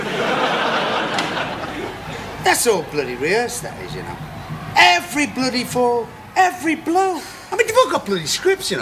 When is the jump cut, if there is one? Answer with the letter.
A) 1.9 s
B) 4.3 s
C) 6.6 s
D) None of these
D